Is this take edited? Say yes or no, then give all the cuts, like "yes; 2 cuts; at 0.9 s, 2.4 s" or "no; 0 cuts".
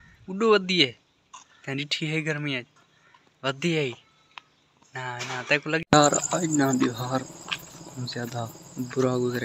yes; 1 cut; at 5.8 s